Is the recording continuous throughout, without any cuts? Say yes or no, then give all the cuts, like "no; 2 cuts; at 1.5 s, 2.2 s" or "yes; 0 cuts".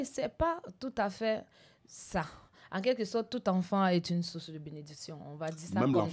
yes; 0 cuts